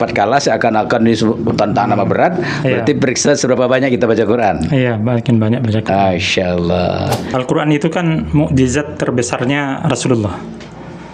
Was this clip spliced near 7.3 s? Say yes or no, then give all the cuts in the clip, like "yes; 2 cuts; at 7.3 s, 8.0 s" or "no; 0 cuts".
yes; 1 cut; at 7.3 s